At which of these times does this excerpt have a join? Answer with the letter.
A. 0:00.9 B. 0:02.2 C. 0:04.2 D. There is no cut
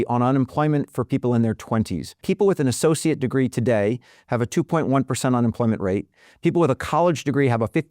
B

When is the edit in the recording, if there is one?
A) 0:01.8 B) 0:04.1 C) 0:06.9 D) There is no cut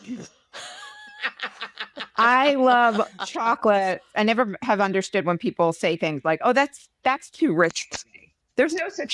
B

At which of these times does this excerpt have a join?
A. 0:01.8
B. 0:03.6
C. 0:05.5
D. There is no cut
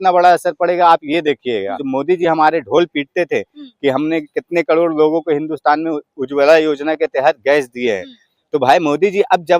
A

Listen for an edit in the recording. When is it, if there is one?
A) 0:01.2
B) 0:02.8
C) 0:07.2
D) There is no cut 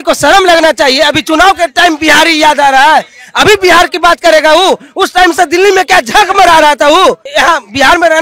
C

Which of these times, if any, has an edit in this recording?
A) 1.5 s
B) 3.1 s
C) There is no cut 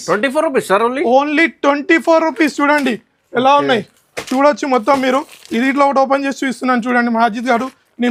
C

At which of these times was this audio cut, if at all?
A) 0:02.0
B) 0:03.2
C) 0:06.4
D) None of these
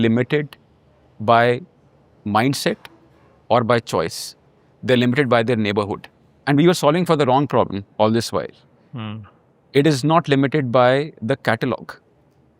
C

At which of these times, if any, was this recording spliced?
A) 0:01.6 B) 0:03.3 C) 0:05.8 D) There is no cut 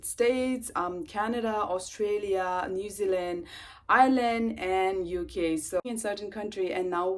C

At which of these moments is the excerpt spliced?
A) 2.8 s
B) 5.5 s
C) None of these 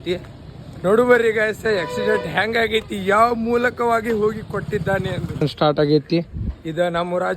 B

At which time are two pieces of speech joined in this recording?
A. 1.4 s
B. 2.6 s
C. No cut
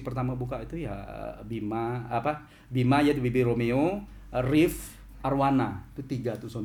C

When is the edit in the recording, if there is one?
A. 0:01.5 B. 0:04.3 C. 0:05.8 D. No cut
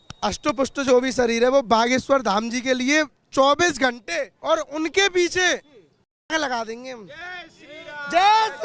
B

